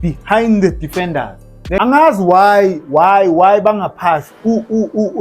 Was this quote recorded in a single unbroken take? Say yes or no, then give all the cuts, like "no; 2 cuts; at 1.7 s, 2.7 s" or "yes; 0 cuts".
no; 1 cut; at 1.8 s